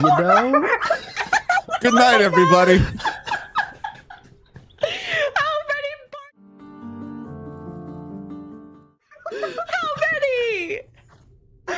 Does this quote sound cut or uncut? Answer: uncut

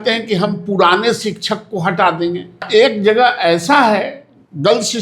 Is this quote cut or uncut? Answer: cut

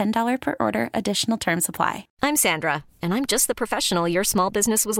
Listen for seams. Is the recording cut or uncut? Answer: cut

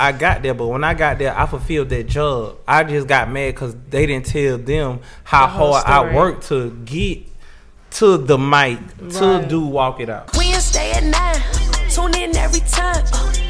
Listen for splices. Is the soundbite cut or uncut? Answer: cut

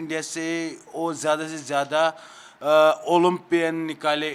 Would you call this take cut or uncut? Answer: uncut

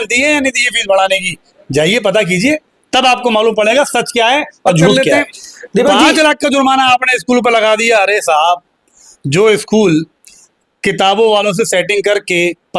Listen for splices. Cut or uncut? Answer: cut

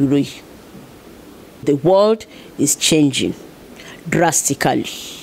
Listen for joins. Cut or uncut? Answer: cut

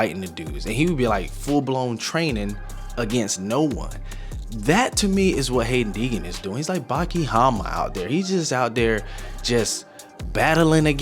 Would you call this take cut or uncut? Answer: uncut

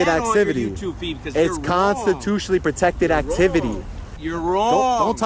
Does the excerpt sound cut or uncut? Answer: cut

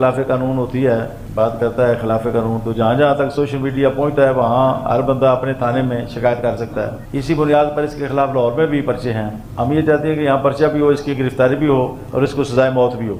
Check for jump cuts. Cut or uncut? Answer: uncut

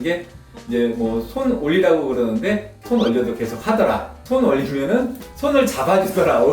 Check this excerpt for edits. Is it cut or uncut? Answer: cut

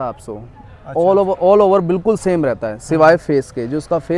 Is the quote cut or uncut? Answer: uncut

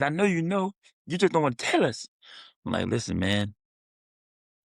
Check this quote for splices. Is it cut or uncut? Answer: uncut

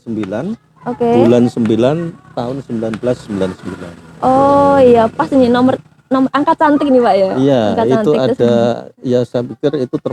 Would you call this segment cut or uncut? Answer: uncut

